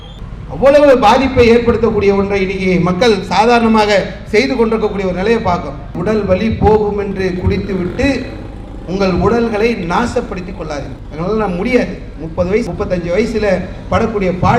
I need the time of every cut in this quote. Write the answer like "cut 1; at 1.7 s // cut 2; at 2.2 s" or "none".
cut 1; at 5.9 s